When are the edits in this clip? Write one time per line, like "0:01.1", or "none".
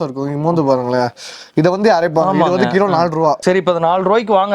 0:03.4

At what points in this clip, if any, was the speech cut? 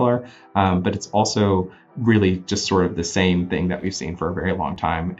0:01.8

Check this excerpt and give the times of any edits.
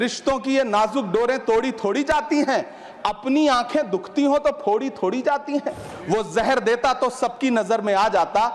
0:05.9

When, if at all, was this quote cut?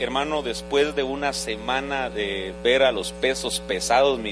0:01.3

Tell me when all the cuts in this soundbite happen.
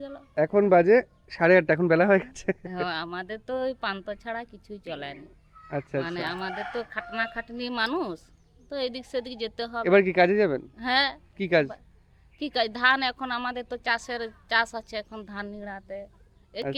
none

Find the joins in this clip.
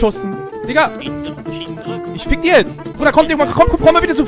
0:02.9

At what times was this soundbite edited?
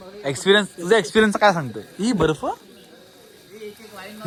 none

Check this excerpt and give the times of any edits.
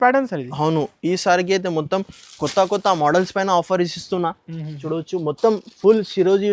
none

